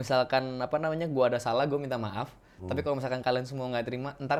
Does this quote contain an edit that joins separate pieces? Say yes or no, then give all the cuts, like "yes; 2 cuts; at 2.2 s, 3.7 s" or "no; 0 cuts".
no; 0 cuts